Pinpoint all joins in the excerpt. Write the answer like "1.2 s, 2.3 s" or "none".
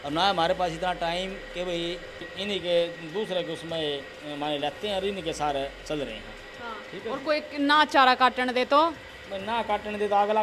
2.2 s

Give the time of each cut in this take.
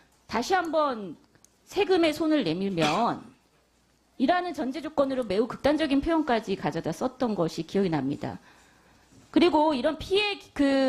none

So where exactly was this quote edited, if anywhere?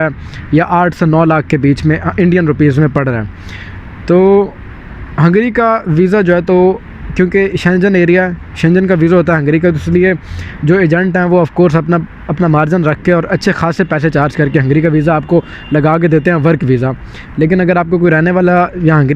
none

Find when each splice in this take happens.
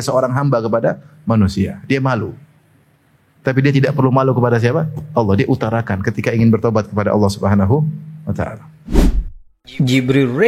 8.7 s

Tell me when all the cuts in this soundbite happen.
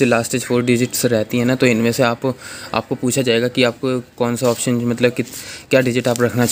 none

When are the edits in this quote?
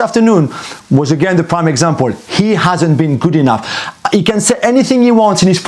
none

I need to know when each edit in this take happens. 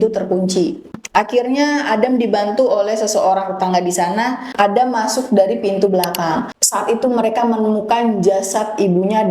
6.6 s

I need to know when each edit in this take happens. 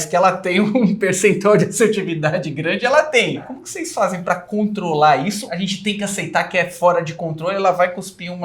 3.6 s, 5.4 s

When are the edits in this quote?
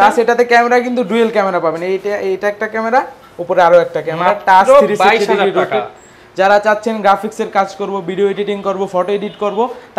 none

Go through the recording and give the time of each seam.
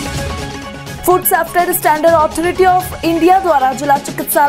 0.9 s

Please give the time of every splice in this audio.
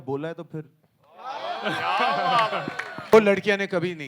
3.1 s

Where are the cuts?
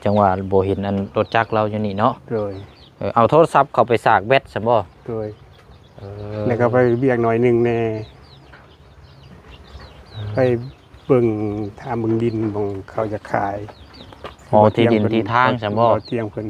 none

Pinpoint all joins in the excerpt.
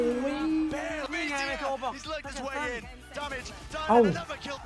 1.1 s

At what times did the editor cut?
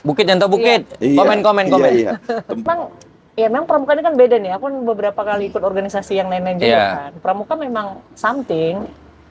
2.6 s

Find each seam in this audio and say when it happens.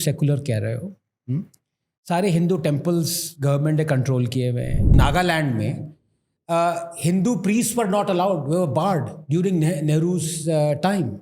4.9 s

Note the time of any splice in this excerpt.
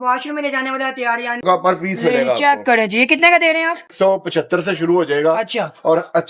1.4 s, 3.9 s

